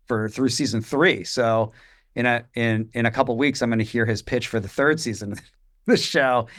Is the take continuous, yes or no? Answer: yes